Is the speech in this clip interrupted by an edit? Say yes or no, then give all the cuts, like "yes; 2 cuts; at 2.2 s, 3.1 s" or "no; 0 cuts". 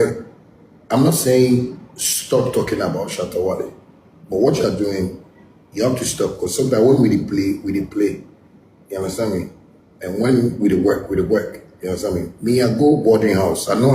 yes; 1 cut; at 2.3 s